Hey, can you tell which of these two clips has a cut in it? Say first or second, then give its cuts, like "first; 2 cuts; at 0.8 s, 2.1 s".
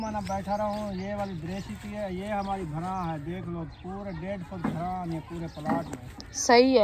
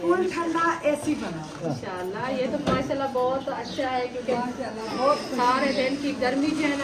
second; 1 cut; at 1.7 s